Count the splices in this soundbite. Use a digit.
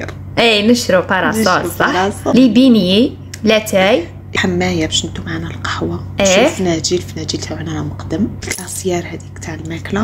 3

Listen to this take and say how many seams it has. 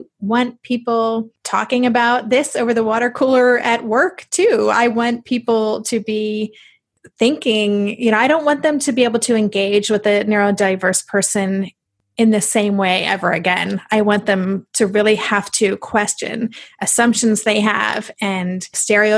1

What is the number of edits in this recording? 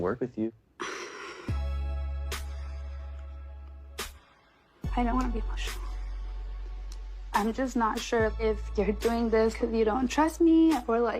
1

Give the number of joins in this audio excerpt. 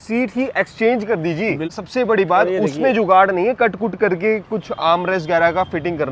1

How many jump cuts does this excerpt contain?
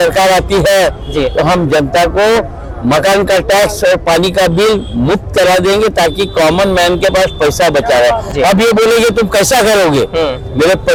0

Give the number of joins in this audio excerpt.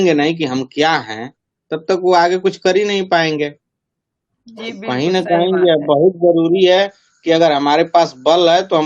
0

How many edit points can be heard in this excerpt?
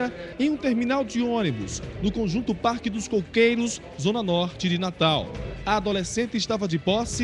1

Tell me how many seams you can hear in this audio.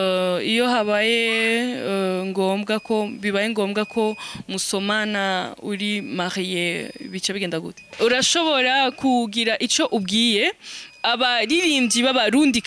1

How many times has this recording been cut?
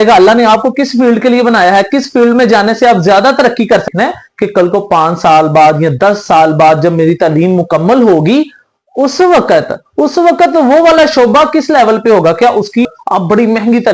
2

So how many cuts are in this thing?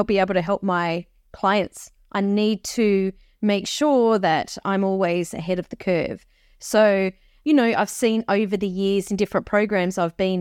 0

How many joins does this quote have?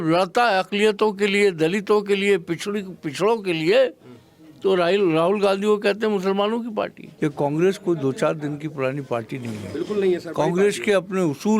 1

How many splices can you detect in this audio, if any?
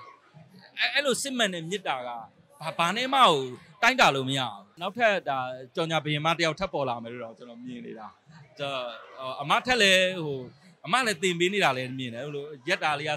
1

